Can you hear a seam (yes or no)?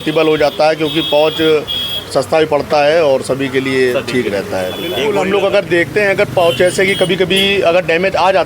yes